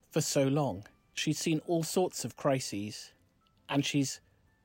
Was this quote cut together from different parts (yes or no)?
yes